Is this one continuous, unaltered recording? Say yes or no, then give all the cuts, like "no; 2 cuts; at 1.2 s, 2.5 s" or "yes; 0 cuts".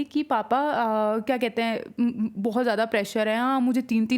yes; 0 cuts